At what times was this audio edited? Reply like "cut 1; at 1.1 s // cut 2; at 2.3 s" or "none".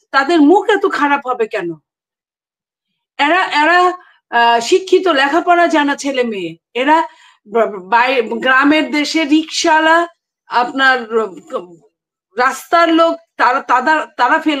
none